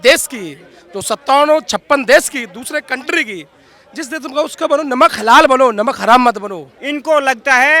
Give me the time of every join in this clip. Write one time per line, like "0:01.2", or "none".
0:06.7